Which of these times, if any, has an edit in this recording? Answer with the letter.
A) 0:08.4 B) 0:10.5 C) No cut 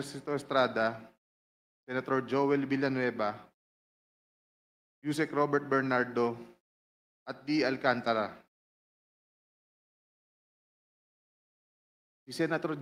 C